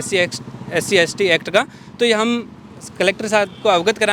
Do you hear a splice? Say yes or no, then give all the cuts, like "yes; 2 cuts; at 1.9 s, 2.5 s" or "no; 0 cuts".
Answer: no; 0 cuts